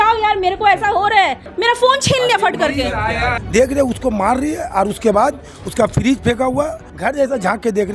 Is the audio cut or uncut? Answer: cut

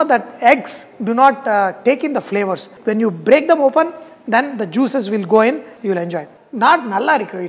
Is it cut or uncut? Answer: cut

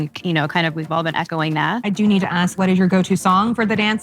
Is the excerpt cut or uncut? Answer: cut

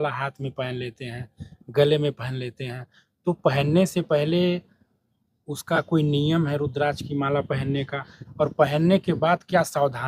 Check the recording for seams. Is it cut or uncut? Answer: uncut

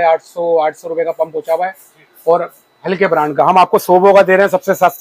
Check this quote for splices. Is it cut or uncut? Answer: uncut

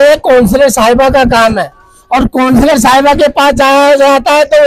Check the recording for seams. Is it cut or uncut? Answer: uncut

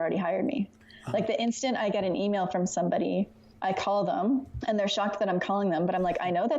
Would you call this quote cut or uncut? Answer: cut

